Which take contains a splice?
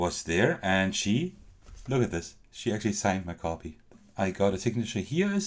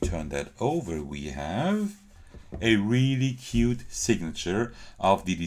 first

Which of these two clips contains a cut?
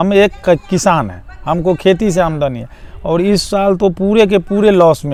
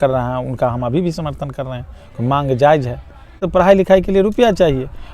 second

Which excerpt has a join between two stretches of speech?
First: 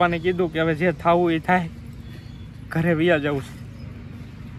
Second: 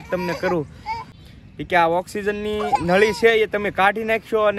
second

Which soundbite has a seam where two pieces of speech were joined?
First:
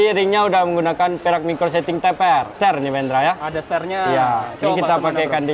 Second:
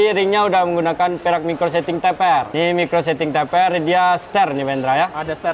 first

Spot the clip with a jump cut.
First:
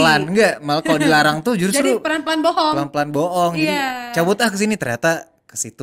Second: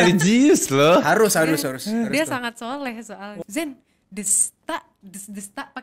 second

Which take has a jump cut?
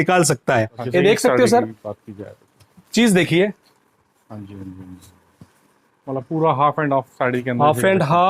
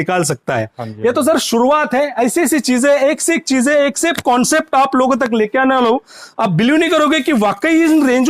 first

